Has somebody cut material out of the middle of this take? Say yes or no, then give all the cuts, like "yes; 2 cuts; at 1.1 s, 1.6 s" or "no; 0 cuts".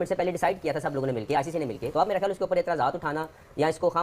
yes; 1 cut; at 1.9 s